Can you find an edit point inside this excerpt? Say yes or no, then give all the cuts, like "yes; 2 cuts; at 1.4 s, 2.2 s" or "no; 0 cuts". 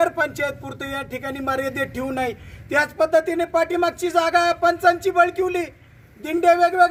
no; 0 cuts